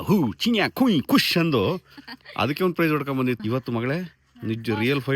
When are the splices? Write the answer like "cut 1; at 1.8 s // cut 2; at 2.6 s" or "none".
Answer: cut 1; at 3.4 s